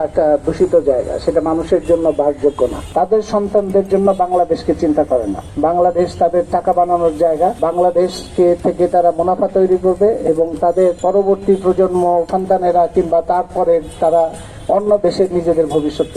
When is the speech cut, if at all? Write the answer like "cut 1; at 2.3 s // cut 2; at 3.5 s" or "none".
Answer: cut 1; at 2.8 s // cut 2; at 5.4 s // cut 3; at 7.6 s // cut 4; at 11.0 s // cut 5; at 12.3 s

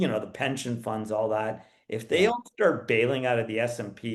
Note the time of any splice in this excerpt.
none

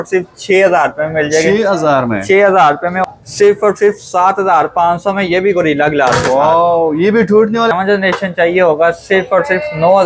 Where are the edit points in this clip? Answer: cut 1; at 3.0 s // cut 2; at 7.7 s

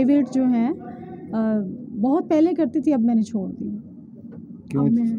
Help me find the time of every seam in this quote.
none

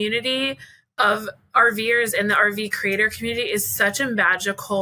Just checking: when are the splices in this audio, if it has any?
none

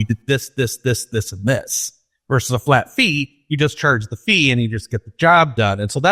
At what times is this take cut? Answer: none

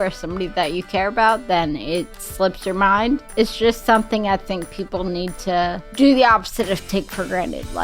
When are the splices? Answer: cut 1; at 3.3 s // cut 2; at 5.8 s

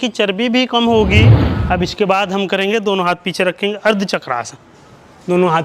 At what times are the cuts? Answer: cut 1; at 1.5 s

